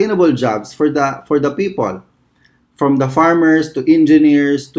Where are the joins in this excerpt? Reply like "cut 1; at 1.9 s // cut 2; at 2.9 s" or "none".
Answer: none